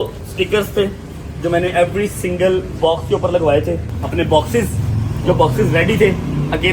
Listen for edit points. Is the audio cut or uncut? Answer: cut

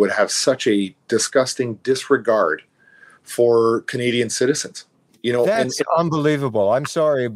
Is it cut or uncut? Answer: uncut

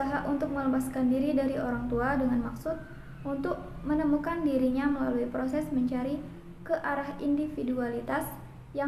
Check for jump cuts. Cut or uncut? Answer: uncut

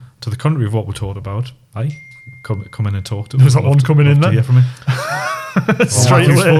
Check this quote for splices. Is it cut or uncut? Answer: uncut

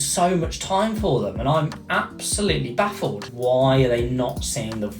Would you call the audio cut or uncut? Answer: cut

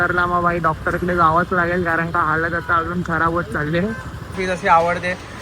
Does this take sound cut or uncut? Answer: cut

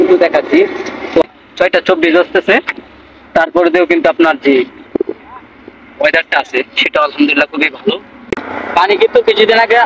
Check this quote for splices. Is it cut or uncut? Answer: cut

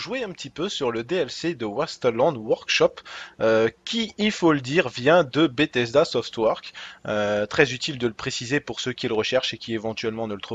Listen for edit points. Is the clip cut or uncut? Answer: uncut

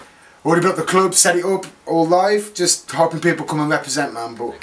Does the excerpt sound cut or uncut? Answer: cut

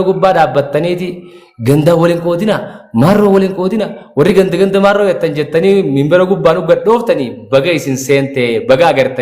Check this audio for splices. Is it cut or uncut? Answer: uncut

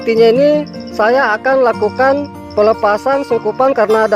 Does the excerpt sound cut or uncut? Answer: cut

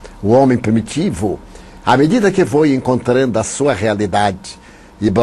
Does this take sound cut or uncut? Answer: uncut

